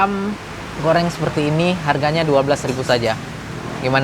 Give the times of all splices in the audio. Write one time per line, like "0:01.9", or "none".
none